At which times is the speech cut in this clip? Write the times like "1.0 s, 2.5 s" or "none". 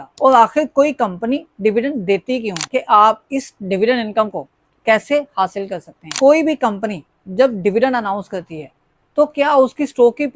2.6 s, 6.0 s